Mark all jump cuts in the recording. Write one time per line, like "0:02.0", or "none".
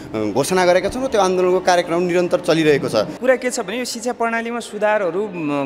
0:03.1